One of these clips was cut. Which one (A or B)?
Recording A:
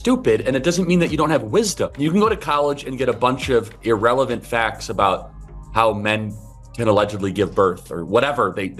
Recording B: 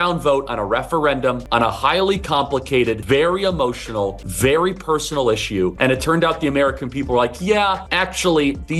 B